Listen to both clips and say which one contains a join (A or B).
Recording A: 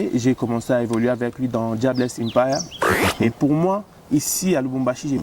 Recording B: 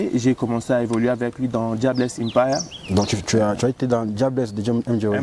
A